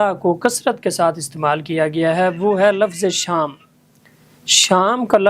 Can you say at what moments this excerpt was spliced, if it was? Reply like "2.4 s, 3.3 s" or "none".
none